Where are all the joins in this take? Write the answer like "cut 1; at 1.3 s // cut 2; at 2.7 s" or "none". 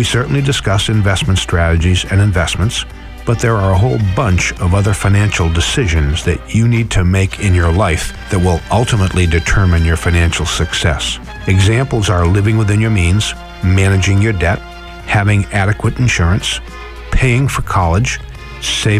none